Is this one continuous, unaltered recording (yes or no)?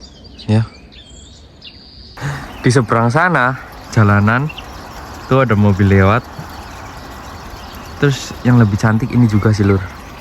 no